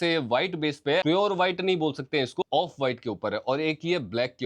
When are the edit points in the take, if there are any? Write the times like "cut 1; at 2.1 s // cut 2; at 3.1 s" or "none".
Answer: cut 1; at 1.0 s